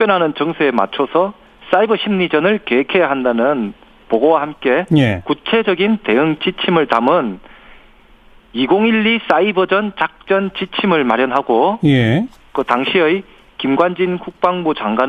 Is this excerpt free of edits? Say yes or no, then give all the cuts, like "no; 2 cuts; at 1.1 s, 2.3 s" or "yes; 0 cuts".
yes; 0 cuts